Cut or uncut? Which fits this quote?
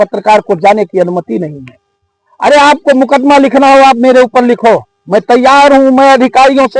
uncut